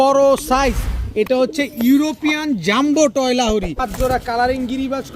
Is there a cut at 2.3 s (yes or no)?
no